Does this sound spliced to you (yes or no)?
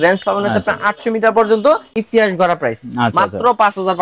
yes